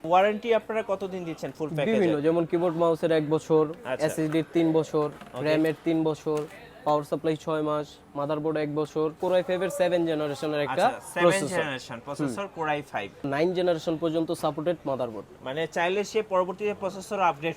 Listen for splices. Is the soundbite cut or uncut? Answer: cut